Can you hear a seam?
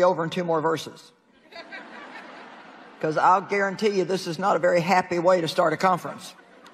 yes; 1 cut; at 5.5 s

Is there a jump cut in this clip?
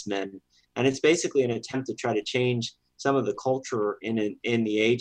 no; 0 cuts

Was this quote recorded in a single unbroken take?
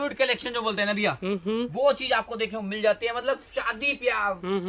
yes; 0 cuts

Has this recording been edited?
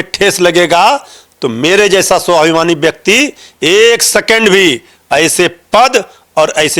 no; 0 cuts

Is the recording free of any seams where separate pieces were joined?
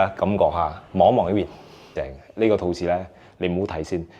no; 1 cut; at 1.9 s

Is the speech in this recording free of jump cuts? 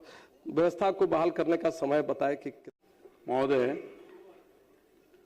no; 1 cut; at 2.7 s

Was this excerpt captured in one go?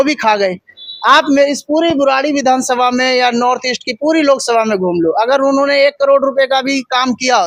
yes; 0 cuts

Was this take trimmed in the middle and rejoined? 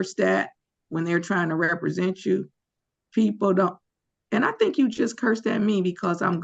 no; 0 cuts

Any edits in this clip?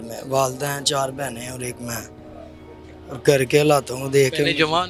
no; 0 cuts

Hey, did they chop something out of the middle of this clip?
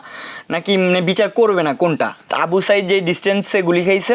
yes; 1 cut; at 2.3 s

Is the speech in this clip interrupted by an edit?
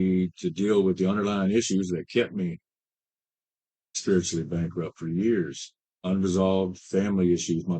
no; 0 cuts

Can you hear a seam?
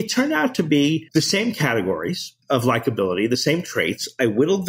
yes; 2 cuts; at 1.1 s, 2.3 s

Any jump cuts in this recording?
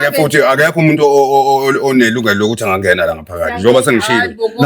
no; 0 cuts

